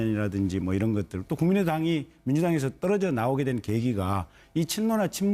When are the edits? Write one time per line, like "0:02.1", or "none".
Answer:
none